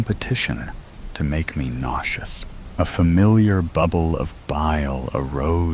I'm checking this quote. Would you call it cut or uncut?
cut